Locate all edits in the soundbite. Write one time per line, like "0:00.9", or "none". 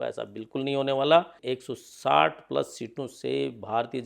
0:01.4